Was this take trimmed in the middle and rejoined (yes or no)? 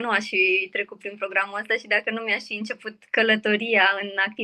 no